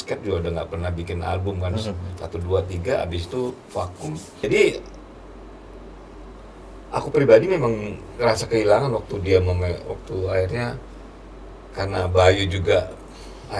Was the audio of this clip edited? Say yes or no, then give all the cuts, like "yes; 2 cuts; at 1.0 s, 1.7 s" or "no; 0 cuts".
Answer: yes; 1 cut; at 4.4 s